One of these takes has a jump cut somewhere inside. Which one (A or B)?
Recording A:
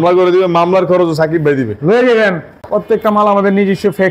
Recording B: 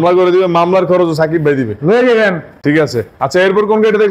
A